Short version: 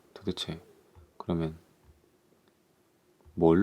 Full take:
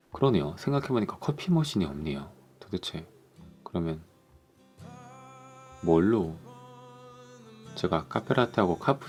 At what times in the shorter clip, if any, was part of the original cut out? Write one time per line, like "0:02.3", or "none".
none